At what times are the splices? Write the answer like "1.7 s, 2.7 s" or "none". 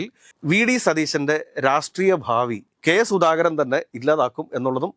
2.7 s